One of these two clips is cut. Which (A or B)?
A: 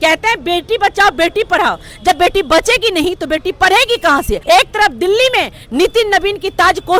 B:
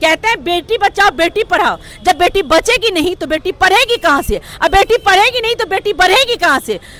A